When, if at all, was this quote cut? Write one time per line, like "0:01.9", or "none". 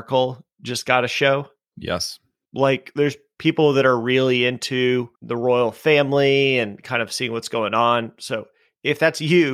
0:02.4
0:05.2